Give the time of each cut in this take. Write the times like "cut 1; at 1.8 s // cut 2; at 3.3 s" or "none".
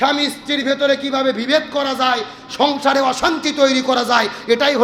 none